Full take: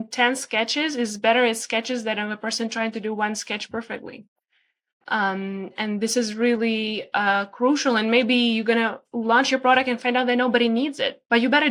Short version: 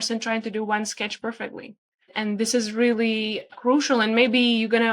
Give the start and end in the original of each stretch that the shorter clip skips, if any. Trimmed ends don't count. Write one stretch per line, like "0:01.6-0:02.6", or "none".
0:04.6-0:05.7
0:07.1-0:07.5

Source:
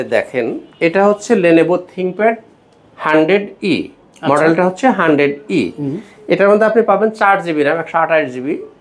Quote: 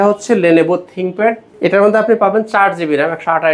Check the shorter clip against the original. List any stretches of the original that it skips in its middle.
0:02.5-0:06.1

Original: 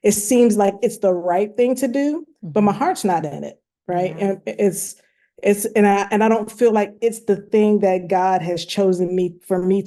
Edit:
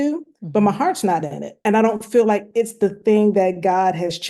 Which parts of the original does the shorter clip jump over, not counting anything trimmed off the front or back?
0:03.6-0:06.1

